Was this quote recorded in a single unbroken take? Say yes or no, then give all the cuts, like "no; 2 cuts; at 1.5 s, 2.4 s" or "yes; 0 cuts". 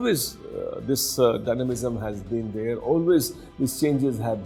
yes; 0 cuts